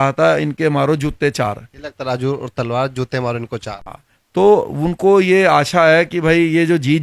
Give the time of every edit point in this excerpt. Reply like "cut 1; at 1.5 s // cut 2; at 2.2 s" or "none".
none